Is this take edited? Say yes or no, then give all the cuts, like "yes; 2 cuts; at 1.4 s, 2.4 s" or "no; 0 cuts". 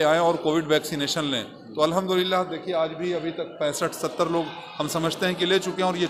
no; 0 cuts